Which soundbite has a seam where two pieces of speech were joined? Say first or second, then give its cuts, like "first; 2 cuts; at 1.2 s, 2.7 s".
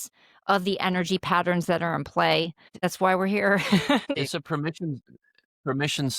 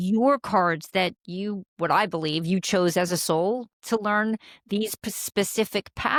first; 2 cuts; at 2.8 s, 4.1 s